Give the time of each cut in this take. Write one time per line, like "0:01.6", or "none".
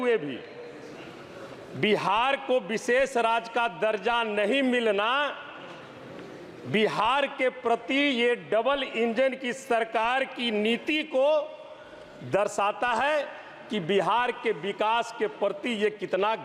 none